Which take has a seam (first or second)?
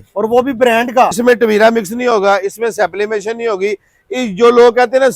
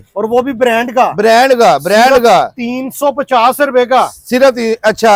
first